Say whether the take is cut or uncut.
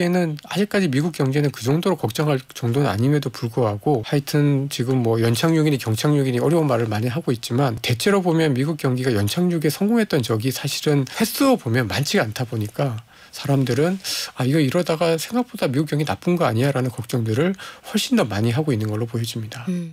cut